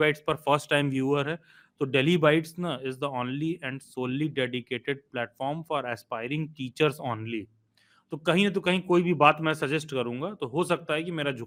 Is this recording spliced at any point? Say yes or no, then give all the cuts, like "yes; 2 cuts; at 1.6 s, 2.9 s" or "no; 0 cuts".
no; 0 cuts